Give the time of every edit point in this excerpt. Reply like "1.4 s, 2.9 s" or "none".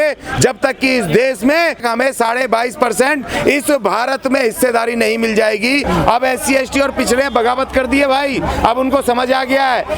1.8 s, 5.9 s